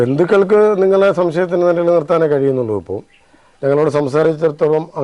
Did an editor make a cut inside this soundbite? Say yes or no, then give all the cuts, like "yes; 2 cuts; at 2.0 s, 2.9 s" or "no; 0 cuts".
no; 0 cuts